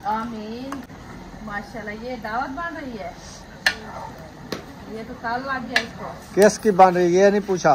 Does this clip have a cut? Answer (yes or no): no